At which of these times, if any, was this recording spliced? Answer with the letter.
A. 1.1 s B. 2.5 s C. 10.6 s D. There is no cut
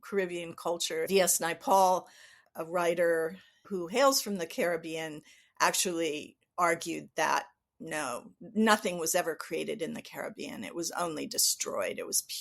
A